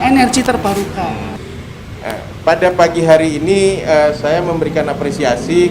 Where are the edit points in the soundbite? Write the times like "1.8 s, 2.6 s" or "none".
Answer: 1.4 s